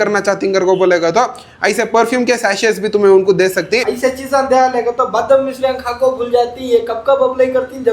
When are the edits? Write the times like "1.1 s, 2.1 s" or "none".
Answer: 3.9 s